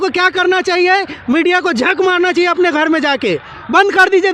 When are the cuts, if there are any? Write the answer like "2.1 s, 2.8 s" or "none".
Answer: none